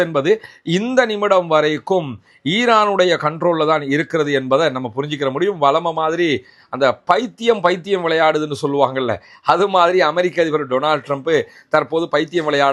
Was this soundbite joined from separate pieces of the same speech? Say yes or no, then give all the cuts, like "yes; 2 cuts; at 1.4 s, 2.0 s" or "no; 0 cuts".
no; 0 cuts